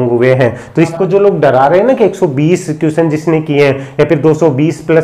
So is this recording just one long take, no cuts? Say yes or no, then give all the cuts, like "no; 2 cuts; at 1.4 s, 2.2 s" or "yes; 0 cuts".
no; 1 cut; at 0.9 s